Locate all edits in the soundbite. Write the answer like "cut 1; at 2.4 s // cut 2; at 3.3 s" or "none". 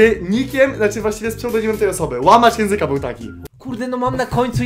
cut 1; at 3.4 s